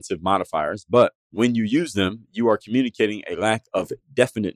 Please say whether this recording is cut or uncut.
cut